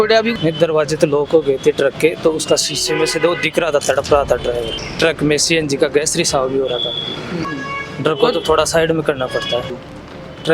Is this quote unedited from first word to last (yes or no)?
no